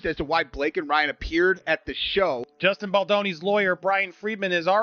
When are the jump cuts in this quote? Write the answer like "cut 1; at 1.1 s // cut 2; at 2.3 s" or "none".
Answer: cut 1; at 2.5 s // cut 2; at 3.6 s